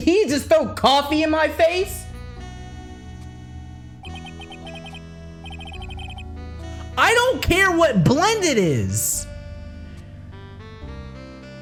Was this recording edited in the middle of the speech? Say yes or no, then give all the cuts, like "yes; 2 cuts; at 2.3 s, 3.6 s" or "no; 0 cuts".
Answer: no; 0 cuts